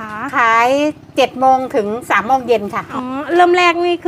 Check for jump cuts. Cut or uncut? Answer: uncut